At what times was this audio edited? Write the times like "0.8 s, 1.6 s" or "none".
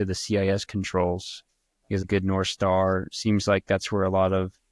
2.0 s